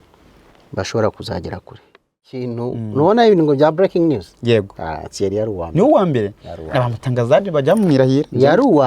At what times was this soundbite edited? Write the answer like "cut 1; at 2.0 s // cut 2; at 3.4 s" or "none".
cut 1; at 2.5 s

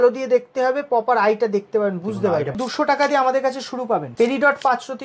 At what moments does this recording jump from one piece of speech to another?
cut 1; at 2.6 s // cut 2; at 4.1 s

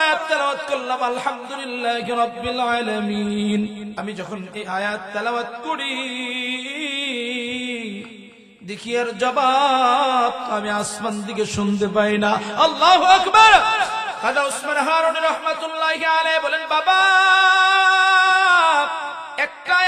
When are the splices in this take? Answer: cut 1; at 3.9 s

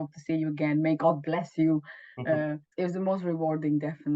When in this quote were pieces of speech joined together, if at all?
cut 1; at 2.6 s

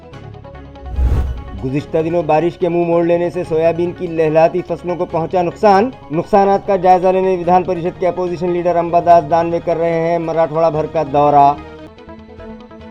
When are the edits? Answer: cut 1; at 1.0 s

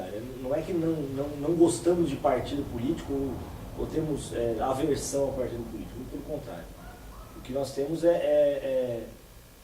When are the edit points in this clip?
cut 1; at 1.2 s

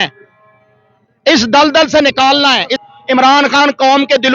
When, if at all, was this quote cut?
cut 1; at 2.8 s

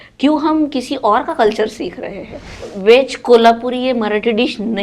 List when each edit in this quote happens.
cut 1; at 2.7 s

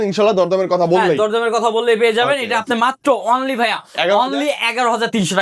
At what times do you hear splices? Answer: none

